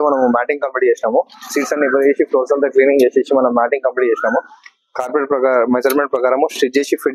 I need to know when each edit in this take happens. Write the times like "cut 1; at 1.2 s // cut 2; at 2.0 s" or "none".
none